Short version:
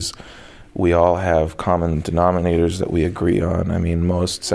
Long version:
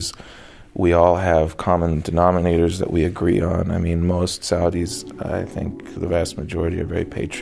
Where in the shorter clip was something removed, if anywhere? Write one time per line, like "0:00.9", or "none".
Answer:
none